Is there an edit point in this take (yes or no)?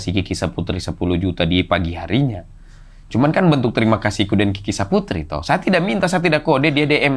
no